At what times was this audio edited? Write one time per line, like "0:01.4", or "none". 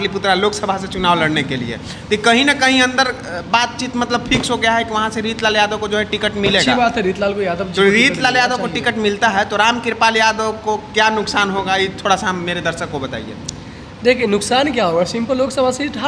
none